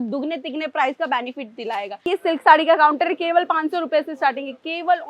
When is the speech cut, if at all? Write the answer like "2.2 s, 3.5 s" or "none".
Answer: 2.0 s